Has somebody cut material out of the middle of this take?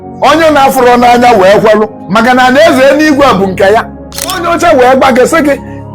yes; 2 cuts; at 2.0 s, 4.4 s

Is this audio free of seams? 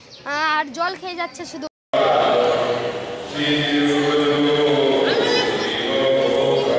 no; 1 cut; at 1.7 s

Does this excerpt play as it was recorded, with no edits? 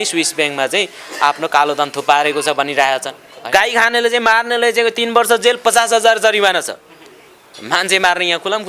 no; 1 cut; at 3.4 s

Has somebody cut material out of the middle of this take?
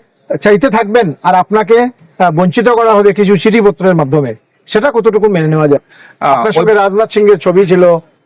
yes; 1 cut; at 5.9 s

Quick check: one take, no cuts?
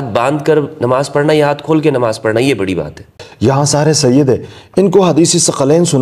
no; 1 cut; at 3.2 s

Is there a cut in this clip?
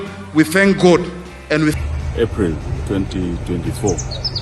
yes; 1 cut; at 1.8 s

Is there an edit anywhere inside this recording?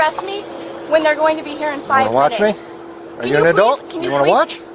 no; 0 cuts

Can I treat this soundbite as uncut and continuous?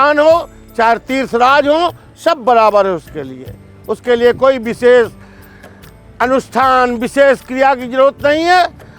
yes; 0 cuts

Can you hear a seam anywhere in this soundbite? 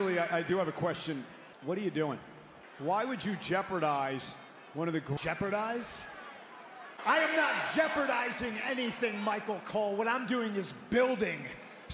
yes; 1 cut; at 6.9 s

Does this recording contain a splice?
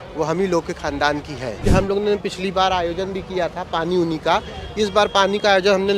yes; 1 cut; at 1.5 s

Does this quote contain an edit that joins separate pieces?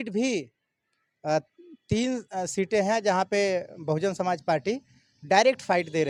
no; 0 cuts

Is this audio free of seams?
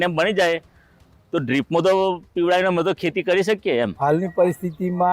no; 1 cut; at 3.9 s

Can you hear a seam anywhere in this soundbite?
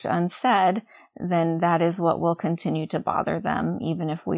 no; 0 cuts

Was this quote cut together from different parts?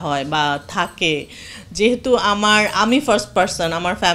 no; 0 cuts

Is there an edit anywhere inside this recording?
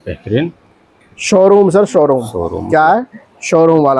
no; 0 cuts

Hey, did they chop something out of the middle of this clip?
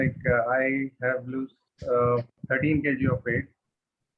no; 0 cuts

